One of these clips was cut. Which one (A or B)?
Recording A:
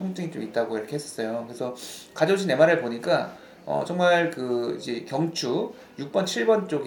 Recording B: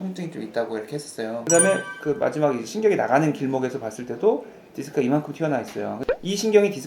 B